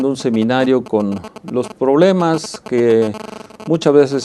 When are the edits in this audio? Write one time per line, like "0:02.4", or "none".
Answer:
0:01.6